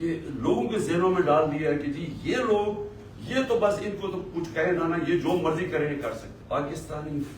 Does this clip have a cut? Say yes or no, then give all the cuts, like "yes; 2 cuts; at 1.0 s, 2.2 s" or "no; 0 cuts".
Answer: yes; 1 cut; at 6.3 s